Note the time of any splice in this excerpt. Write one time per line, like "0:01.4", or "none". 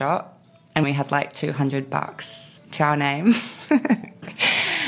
0:00.8
0:02.7